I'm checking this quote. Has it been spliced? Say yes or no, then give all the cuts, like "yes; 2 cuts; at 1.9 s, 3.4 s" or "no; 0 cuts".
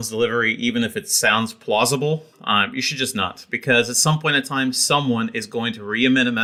no; 0 cuts